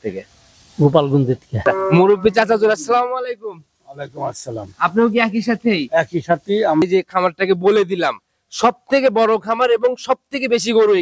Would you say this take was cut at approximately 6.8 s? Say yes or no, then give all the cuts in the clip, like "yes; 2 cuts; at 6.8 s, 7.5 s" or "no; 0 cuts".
yes; 2 cuts; at 1.6 s, 6.8 s